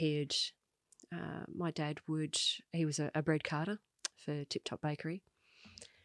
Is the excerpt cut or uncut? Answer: uncut